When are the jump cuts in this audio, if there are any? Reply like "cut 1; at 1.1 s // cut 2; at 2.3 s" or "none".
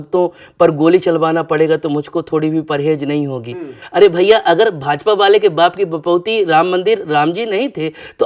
cut 1; at 3.8 s